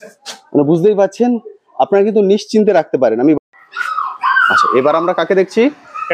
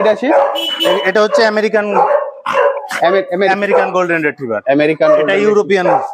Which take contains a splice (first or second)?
first